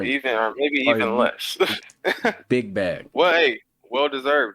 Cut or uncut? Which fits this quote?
cut